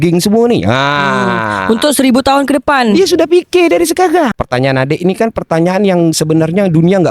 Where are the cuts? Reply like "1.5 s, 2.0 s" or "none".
4.3 s